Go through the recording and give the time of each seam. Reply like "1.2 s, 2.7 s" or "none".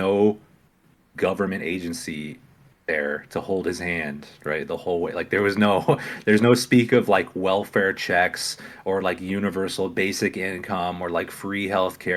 none

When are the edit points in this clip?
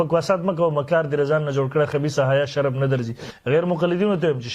3.3 s

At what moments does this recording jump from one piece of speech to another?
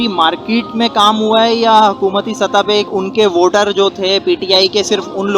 2.9 s

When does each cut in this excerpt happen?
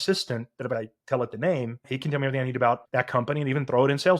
0.7 s, 1.9 s, 2.8 s

